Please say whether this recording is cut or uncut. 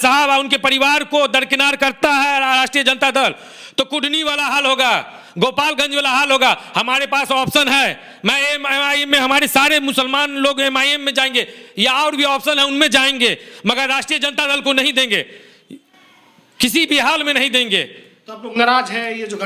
uncut